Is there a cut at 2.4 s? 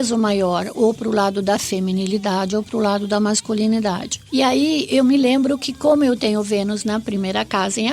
no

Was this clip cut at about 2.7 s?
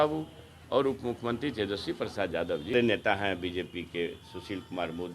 yes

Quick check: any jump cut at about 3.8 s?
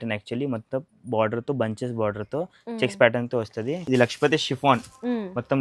yes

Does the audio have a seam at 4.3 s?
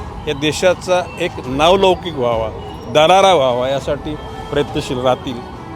no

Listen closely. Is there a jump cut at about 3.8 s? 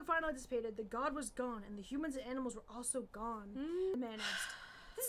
yes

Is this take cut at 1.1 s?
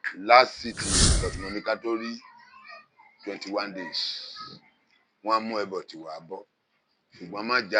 yes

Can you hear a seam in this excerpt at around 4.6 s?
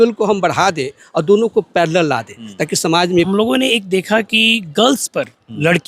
no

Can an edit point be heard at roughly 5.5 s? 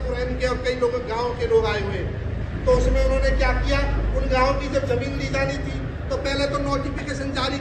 no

